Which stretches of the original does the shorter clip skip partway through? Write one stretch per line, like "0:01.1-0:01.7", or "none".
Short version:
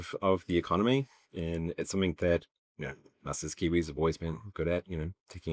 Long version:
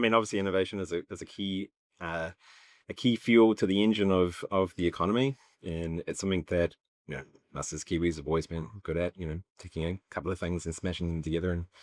none